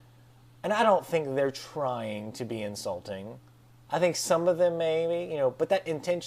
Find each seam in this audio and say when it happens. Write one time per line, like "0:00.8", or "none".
0:01.6